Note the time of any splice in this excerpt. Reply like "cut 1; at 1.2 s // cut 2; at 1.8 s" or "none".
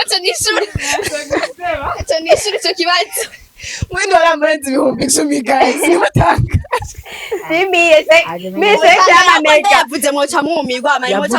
none

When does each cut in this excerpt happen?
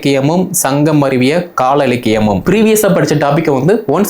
cut 1; at 2.4 s

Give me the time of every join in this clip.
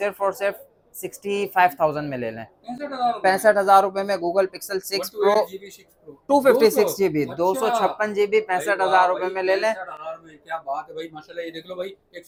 none

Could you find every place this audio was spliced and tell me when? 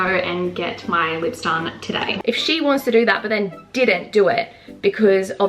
cut 1; at 2.2 s

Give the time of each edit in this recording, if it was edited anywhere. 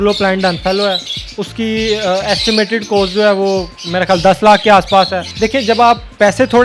cut 1; at 5.2 s

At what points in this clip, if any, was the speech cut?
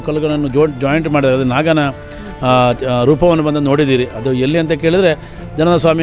none

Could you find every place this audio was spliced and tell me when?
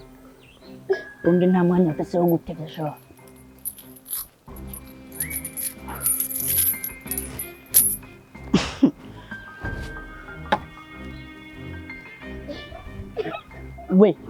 none

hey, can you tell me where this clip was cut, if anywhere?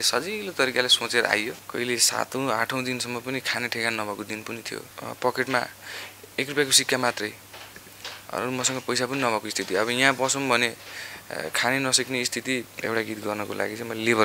cut 1; at 1.6 s // cut 2; at 4.9 s // cut 3; at 12.7 s

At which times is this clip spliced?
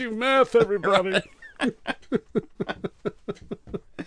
none

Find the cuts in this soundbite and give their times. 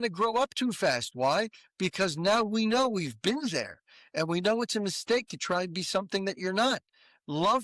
none

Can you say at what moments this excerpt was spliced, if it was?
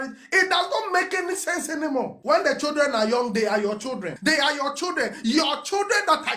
cut 1; at 2.2 s // cut 2; at 4.1 s

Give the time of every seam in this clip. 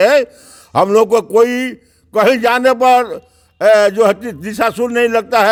none

